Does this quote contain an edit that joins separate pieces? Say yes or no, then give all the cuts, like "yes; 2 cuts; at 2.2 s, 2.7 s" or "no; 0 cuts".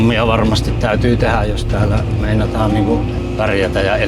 yes; 1 cut; at 3.2 s